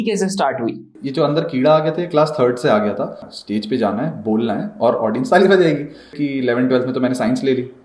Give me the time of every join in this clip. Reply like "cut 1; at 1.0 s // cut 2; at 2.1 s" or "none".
cut 1; at 1.0 s // cut 2; at 3.2 s // cut 3; at 6.2 s